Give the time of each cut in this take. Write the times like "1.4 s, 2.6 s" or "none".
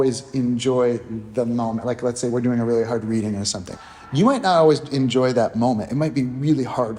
3.7 s